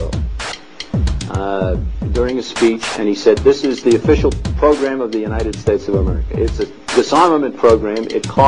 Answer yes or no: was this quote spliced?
no